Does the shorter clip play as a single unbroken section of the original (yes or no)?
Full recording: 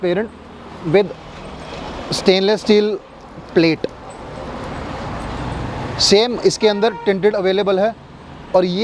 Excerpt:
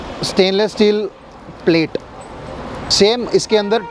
no